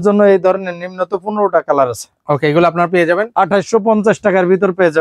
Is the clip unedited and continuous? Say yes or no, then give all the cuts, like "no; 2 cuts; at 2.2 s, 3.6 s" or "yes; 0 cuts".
yes; 0 cuts